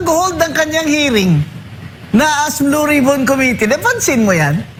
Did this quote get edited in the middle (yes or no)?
no